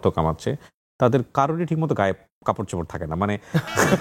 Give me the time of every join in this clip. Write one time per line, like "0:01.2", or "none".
none